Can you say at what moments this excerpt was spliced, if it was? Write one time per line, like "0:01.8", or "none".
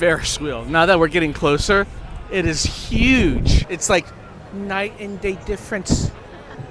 0:03.7